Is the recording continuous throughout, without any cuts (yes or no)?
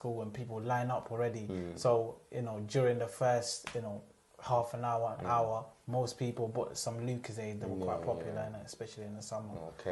yes